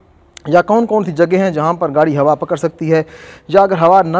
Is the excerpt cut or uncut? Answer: uncut